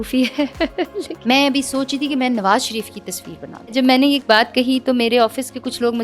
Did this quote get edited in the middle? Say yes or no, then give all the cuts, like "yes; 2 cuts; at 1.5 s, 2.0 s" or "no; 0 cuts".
yes; 2 cuts; at 1.1 s, 3.7 s